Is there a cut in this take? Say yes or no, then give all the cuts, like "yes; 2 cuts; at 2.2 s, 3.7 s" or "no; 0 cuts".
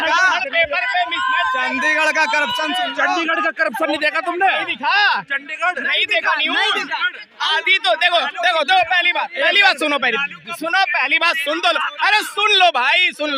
no; 0 cuts